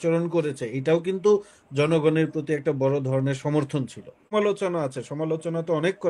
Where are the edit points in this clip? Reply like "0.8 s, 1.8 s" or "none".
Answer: 4.3 s